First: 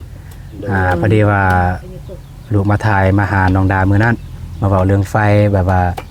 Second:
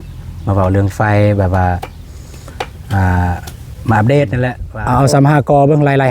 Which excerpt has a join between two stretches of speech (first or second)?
second